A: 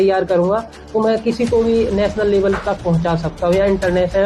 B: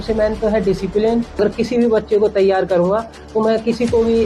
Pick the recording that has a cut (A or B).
B